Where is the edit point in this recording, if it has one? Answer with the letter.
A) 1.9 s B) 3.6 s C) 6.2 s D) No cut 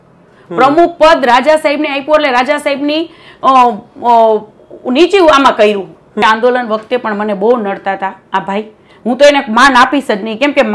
C